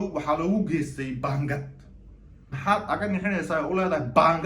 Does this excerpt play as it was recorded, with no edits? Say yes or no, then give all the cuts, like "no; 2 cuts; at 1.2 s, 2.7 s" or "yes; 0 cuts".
no; 1 cut; at 2.5 s